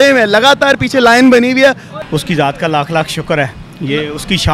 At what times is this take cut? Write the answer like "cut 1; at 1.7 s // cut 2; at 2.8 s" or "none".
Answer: cut 1; at 1.9 s